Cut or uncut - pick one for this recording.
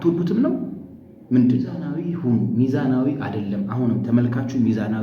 cut